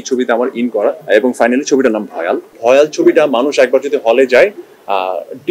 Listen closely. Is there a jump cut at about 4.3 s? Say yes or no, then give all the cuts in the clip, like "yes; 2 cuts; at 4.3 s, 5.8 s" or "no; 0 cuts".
no; 2 cuts; at 1.0 s, 2.5 s